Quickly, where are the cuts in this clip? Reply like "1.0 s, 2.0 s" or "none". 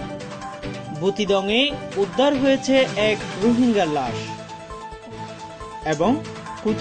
0.9 s